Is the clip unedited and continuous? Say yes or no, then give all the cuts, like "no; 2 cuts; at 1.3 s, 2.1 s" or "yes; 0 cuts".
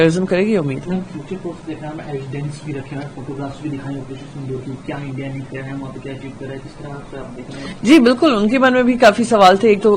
yes; 0 cuts